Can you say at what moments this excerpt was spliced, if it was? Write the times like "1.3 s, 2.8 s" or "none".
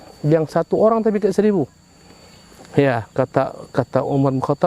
none